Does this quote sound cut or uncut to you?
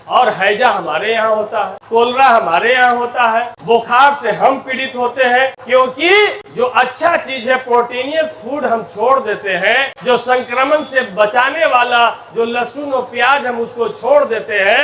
uncut